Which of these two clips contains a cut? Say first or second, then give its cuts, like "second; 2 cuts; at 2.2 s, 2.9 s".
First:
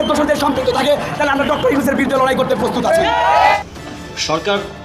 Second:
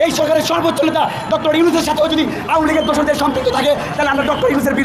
first; 1 cut; at 3.6 s